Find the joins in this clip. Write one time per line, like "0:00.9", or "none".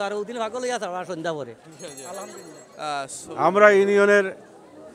0:03.1